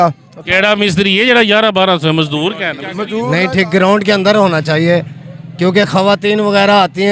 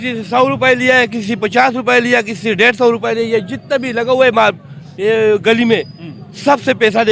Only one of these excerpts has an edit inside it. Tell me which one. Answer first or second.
first